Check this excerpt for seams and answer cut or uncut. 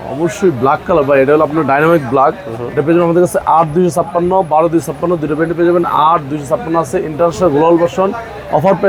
uncut